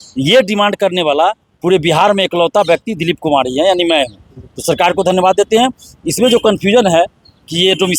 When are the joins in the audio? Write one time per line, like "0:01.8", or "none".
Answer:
none